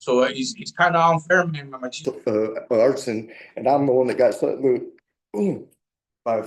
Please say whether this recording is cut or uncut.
cut